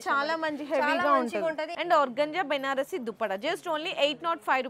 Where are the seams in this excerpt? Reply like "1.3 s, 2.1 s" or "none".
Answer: 1.7 s